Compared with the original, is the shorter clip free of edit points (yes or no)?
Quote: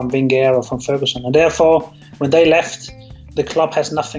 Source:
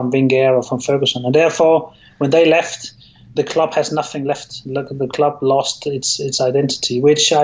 yes